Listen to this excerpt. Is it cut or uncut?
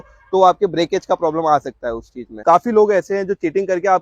cut